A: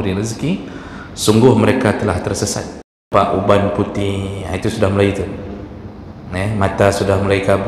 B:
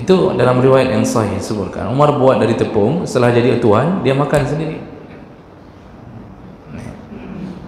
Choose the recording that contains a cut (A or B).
A